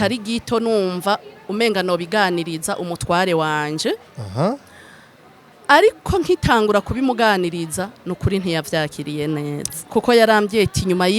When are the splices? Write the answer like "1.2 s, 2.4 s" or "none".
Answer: 9.9 s